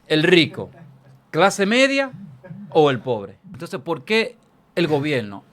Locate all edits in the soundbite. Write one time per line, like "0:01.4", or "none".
0:03.4